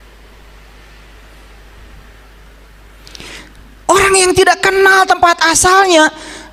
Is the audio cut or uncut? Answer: uncut